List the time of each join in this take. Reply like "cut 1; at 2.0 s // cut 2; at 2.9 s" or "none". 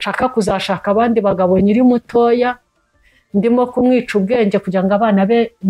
none